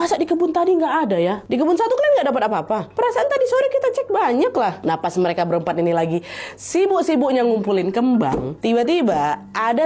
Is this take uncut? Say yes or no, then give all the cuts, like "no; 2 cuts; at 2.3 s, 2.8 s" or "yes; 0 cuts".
no; 3 cuts; at 1.4 s, 4.8 s, 8.5 s